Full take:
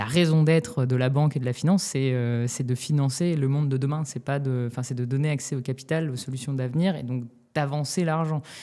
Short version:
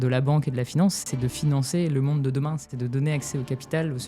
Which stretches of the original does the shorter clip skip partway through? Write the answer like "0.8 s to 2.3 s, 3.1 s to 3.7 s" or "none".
1.9 s to 2.5 s, 4.2 s to 4.9 s